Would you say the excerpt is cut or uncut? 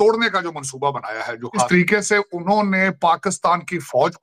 cut